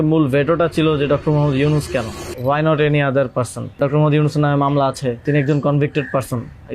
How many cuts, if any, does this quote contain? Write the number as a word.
three